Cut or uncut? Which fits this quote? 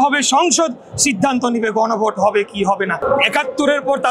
cut